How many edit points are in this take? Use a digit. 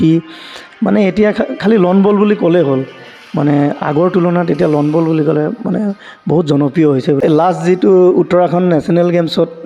1